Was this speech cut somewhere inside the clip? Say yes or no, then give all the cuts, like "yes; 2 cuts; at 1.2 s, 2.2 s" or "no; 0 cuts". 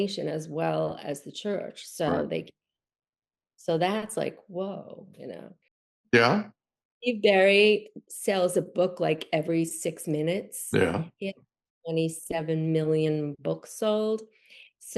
yes; 1 cut; at 6.0 s